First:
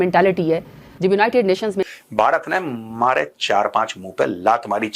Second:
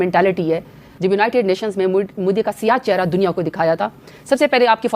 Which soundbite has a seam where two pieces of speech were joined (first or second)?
first